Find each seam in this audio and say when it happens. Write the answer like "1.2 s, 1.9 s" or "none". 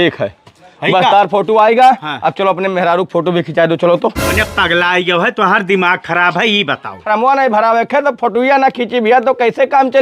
4.3 s, 7.0 s